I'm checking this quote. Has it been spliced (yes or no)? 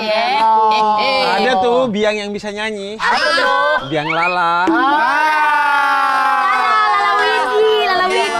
no